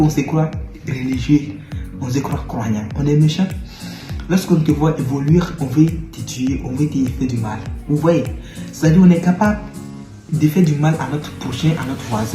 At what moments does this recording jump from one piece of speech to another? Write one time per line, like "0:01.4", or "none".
0:10.3